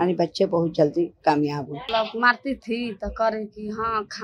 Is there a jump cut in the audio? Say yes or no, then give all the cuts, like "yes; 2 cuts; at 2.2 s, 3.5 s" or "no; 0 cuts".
yes; 1 cut; at 1.8 s